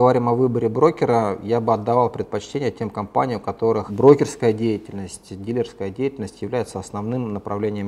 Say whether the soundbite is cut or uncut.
uncut